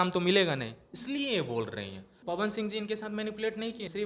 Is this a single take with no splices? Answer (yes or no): no